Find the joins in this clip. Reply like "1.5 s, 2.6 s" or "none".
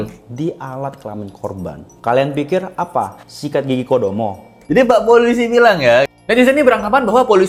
none